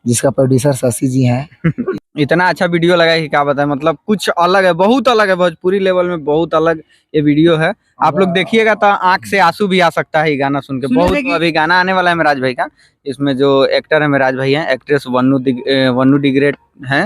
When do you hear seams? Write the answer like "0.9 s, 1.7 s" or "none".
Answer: 1.9 s, 11.3 s